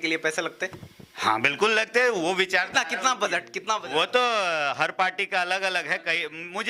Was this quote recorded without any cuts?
yes; 0 cuts

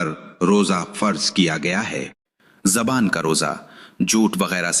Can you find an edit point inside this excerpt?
yes; 1 cut; at 2.7 s

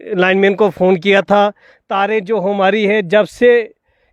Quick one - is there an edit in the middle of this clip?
no; 0 cuts

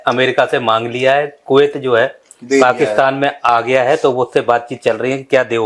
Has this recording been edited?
no; 0 cuts

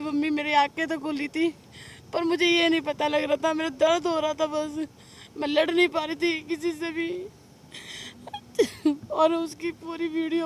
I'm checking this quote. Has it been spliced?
no; 0 cuts

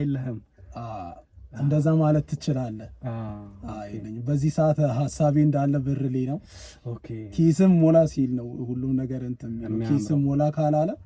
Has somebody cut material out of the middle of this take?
no; 0 cuts

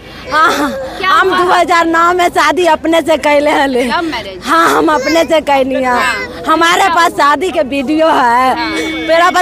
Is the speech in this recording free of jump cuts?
yes; 0 cuts

